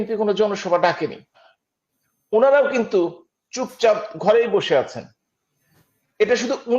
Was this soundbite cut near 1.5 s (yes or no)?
yes